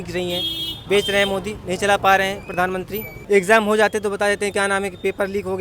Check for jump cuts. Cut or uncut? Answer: cut